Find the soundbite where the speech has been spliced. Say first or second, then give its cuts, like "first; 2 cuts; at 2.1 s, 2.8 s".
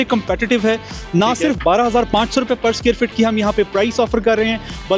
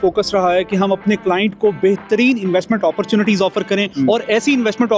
second; 1 cut; at 3.9 s